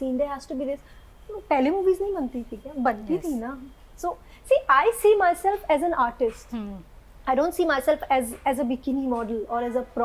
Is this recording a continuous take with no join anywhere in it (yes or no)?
yes